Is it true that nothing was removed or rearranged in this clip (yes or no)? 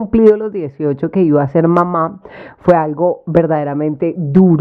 yes